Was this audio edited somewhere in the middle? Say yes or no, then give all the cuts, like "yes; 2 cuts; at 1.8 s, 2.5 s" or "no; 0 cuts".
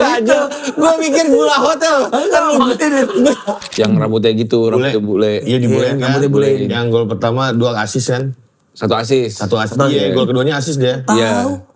yes; 1 cut; at 3.6 s